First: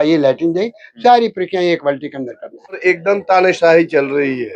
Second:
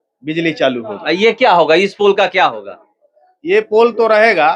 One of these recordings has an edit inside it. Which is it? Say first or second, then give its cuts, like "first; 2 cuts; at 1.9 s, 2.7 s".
first; 1 cut; at 2.8 s